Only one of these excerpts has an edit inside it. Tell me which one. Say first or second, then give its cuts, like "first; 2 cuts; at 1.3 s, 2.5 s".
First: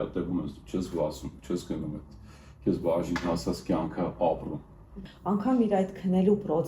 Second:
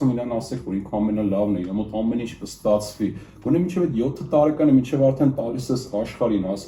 first; 1 cut; at 5.0 s